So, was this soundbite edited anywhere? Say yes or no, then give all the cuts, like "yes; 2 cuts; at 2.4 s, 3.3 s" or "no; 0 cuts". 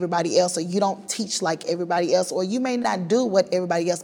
yes; 1 cut; at 2.5 s